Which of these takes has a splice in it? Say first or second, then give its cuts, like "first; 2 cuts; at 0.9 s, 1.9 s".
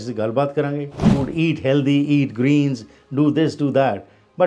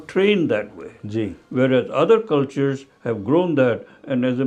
first; 1 cut; at 1.1 s